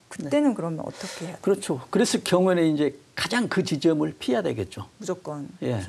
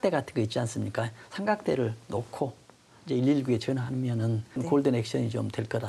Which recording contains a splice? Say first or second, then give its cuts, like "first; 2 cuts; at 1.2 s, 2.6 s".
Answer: second; 1 cut; at 4.5 s